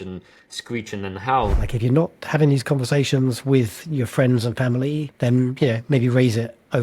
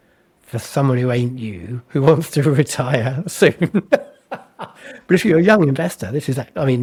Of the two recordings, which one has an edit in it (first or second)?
first